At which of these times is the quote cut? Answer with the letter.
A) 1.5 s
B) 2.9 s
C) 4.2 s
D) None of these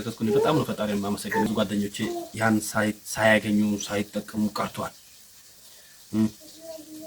A